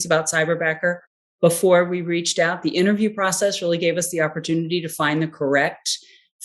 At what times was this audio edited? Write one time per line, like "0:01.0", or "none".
none